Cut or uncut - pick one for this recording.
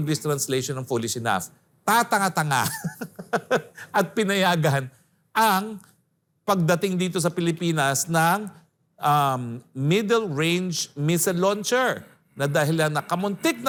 uncut